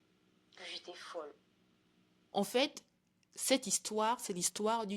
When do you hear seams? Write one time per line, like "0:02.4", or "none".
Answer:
0:02.3